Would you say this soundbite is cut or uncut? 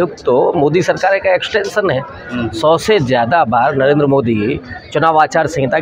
uncut